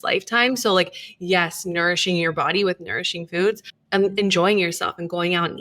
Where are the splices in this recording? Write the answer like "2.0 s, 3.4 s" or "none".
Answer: 3.7 s